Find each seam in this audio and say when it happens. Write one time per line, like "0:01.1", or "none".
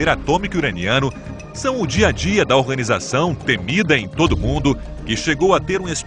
0:03.6